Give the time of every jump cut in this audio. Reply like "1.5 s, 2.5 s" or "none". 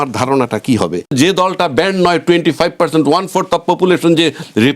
1.1 s